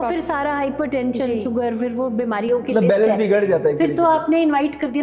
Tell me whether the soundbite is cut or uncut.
uncut